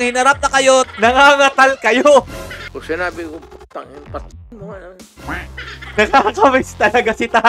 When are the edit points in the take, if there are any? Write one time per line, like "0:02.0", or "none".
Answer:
0:00.9
0:02.6
0:05.8